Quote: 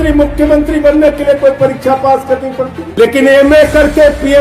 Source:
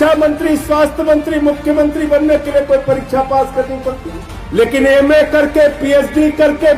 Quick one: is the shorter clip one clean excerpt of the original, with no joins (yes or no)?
no